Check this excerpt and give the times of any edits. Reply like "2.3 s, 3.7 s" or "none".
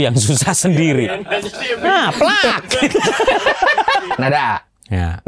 4.1 s